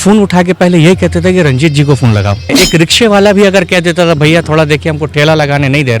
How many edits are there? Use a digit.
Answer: 1